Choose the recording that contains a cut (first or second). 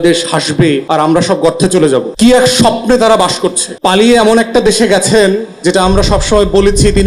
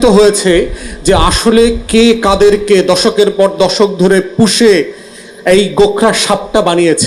first